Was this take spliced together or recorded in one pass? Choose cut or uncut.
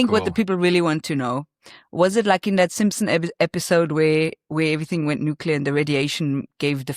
uncut